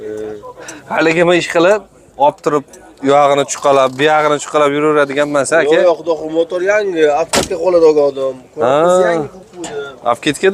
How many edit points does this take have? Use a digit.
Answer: 0